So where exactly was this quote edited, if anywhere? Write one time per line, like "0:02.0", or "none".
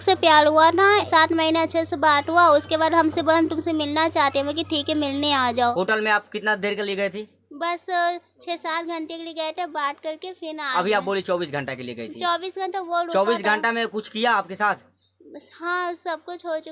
0:01.1
0:05.7